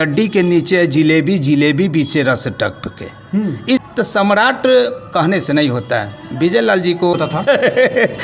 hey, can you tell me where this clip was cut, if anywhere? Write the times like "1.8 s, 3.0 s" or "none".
3.8 s, 7.1 s